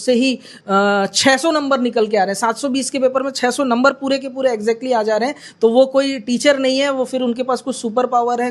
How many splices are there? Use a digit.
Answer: 0